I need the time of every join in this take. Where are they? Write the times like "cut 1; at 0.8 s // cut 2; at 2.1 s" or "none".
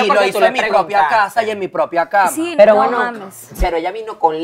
cut 1; at 2.4 s // cut 2; at 3.4 s

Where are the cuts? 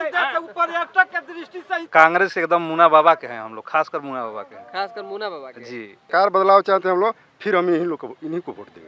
cut 1; at 1.9 s // cut 2; at 6.1 s

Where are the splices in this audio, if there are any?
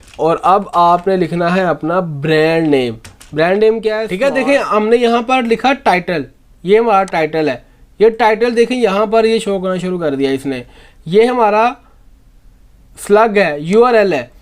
cut 1; at 4.1 s

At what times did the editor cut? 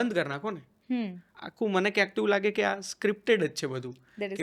cut 1; at 1.2 s

